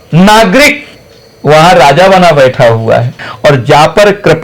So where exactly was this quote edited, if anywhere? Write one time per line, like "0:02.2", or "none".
0:03.2